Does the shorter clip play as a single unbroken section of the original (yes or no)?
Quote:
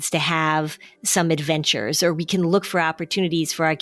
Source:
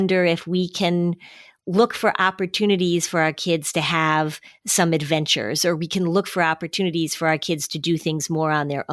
yes